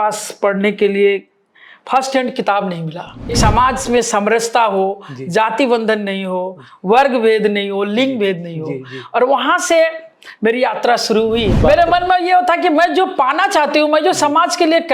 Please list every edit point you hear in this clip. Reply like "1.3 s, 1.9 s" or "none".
3.4 s, 11.6 s